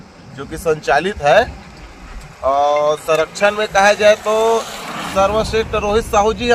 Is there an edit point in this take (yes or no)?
no